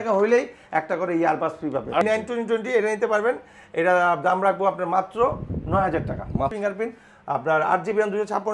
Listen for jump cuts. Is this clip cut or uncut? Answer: cut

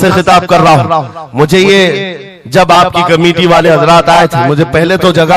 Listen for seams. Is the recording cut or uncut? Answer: uncut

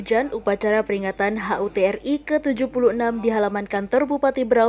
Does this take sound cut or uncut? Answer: uncut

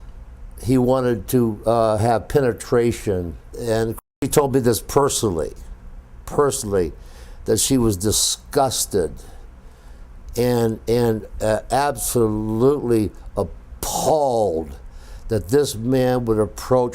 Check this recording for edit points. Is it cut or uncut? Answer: cut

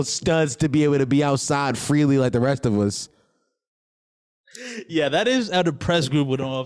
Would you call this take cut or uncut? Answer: uncut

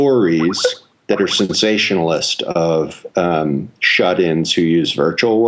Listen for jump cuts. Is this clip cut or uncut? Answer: uncut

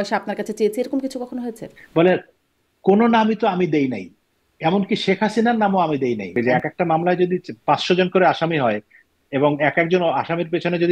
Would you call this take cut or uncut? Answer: cut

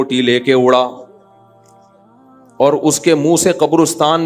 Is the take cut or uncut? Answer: uncut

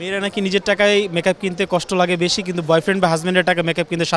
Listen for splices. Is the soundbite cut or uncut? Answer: uncut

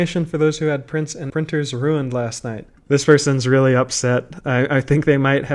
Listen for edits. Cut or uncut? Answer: cut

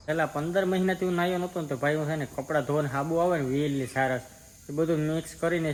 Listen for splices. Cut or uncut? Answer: uncut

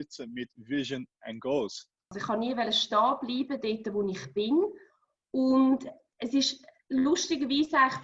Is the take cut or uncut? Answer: cut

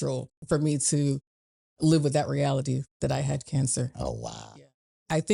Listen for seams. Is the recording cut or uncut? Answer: cut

